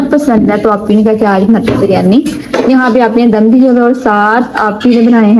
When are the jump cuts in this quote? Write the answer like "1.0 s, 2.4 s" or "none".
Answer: none